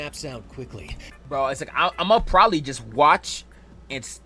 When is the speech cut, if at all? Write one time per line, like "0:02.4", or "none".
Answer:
0:01.1